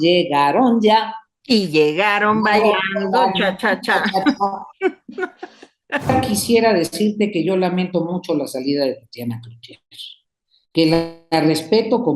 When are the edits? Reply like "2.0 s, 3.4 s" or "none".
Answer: 6.1 s